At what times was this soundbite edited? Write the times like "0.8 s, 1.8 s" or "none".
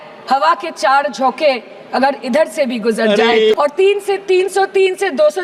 3.5 s